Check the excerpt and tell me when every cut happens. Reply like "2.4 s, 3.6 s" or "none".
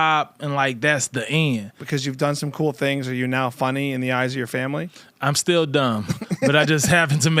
1.8 s